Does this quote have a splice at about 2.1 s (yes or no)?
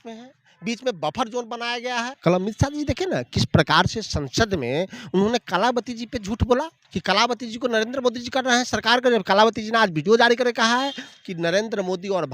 yes